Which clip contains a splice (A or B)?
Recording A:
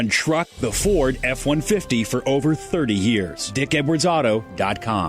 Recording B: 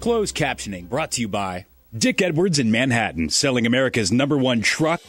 A